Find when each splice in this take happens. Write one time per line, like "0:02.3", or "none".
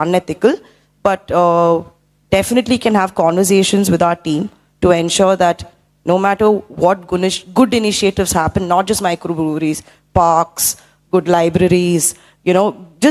none